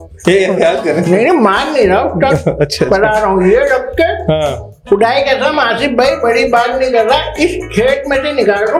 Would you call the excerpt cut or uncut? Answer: uncut